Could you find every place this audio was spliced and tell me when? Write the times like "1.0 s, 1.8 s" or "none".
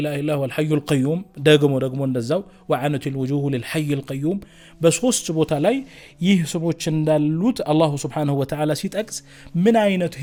none